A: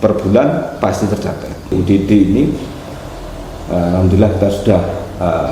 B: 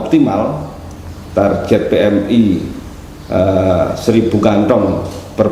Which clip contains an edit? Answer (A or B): A